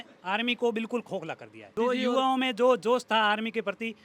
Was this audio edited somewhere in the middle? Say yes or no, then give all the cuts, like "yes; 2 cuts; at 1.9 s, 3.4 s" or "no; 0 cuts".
yes; 1 cut; at 1.7 s